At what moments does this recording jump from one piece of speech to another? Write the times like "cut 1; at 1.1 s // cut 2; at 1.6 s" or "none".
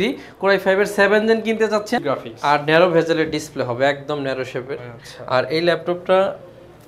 cut 1; at 2.0 s